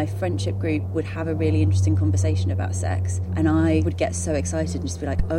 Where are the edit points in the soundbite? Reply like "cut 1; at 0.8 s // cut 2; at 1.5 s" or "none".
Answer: cut 1; at 0.9 s // cut 2; at 3.2 s // cut 3; at 3.8 s